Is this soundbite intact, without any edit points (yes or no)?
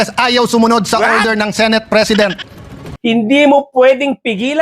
no